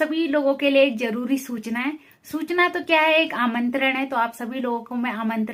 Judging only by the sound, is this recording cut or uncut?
uncut